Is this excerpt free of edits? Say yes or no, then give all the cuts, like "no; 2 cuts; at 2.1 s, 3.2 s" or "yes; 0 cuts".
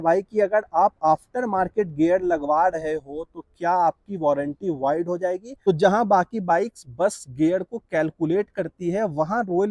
no; 1 cut; at 5.5 s